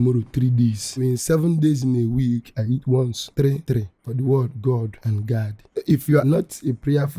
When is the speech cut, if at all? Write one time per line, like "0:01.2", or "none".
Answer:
0:01.0
0:03.0
0:06.2